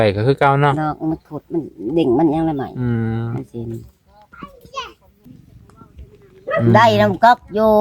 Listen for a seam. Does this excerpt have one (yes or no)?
yes